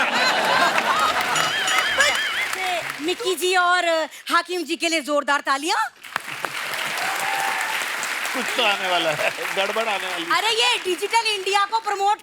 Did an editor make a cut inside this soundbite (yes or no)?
yes